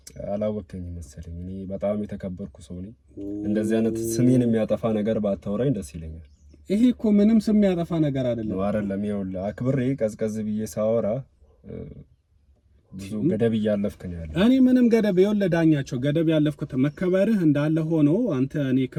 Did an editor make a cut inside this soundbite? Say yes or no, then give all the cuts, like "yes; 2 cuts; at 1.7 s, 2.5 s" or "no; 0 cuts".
no; 0 cuts